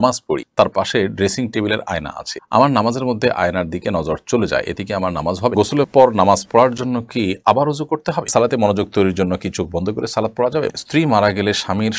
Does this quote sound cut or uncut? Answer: cut